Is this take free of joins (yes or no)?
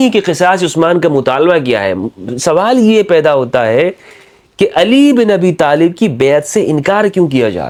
yes